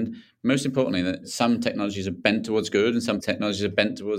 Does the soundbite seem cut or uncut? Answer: cut